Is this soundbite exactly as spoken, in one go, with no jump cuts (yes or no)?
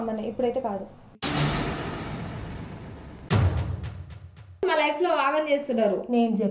no